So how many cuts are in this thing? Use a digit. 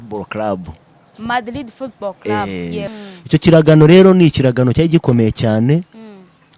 1